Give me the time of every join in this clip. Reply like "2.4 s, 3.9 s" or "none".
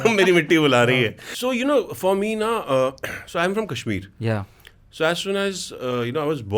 1.2 s